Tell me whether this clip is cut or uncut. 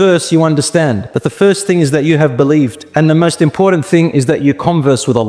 cut